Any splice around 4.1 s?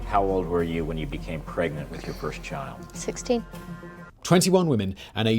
yes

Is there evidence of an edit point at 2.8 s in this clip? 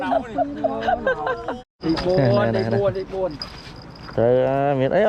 no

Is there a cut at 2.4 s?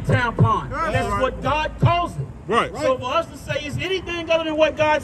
no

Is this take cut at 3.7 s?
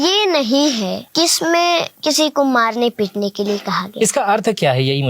no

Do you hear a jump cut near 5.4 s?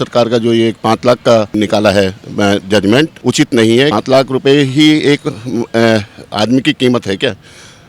no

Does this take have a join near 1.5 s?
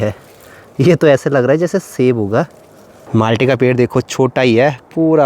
no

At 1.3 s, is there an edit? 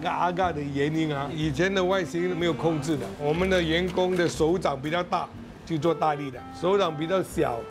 no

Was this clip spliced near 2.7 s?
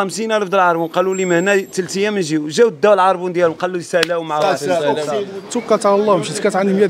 no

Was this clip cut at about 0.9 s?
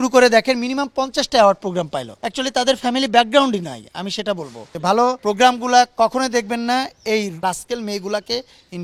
no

